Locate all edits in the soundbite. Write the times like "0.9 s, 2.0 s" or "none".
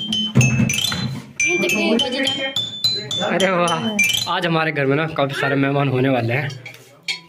4.1 s